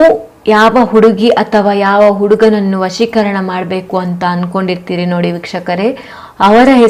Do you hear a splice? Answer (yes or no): no